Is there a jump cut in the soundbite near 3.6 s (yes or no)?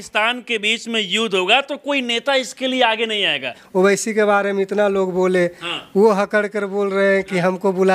yes